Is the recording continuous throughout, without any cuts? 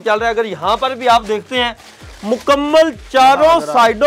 yes; 0 cuts

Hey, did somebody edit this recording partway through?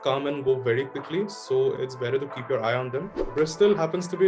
yes; 1 cut; at 3.2 s

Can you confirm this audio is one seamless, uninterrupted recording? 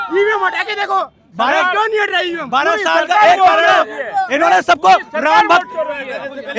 yes; 0 cuts

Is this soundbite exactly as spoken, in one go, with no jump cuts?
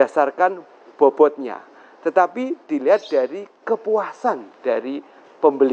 yes; 0 cuts

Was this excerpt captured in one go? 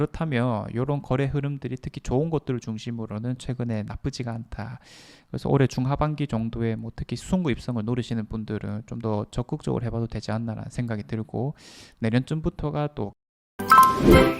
no; 1 cut; at 13.2 s

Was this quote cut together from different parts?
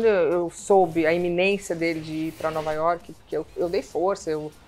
no; 0 cuts

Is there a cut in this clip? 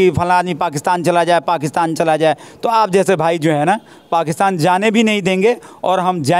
no; 0 cuts

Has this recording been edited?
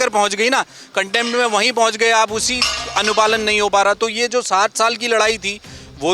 no; 0 cuts

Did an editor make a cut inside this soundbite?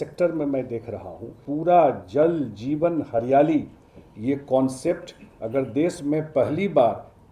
yes; 1 cut; at 1.5 s

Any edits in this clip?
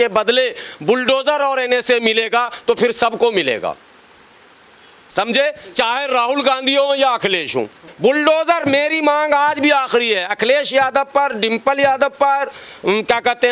yes; 1 cut; at 7.8 s

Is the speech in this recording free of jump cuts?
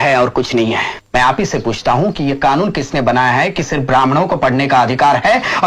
no; 1 cut; at 1.0 s

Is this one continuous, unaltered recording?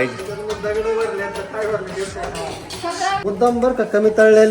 no; 1 cut; at 3.2 s

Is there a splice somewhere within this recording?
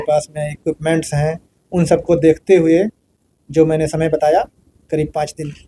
no; 0 cuts

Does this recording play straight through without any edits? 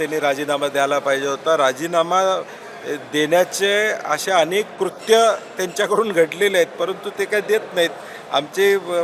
yes; 0 cuts

